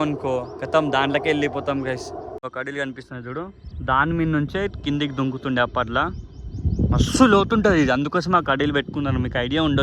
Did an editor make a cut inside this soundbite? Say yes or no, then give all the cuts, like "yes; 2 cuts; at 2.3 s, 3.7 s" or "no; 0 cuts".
yes; 1 cut; at 2.5 s